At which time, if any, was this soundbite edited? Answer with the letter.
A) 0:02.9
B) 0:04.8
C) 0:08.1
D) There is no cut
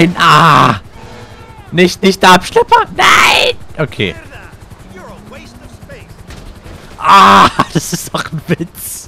B